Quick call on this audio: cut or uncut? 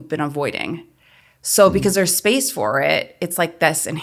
uncut